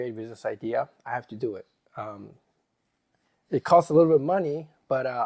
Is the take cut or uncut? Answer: uncut